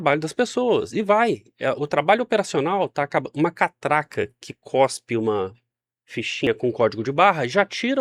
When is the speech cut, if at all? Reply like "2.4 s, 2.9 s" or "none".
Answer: none